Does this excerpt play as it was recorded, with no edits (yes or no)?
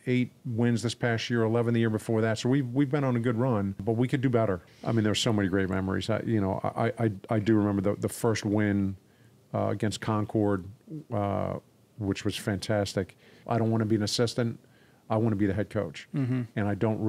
no